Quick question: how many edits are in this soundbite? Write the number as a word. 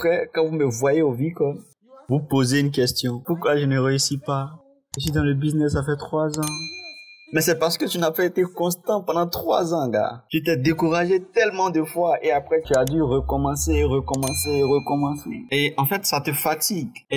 one